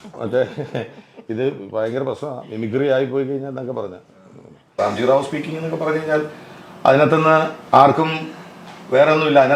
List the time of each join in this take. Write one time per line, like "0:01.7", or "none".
0:04.7